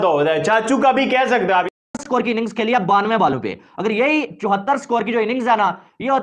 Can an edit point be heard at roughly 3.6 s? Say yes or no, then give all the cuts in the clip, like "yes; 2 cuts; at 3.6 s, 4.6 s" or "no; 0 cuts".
no; 1 cut; at 1.8 s